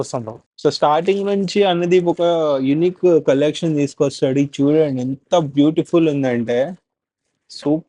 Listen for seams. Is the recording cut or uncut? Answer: uncut